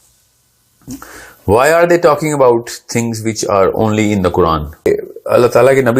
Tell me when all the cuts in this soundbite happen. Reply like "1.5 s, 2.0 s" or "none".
4.9 s